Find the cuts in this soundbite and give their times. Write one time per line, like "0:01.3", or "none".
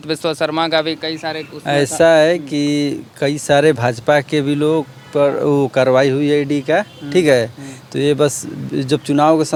none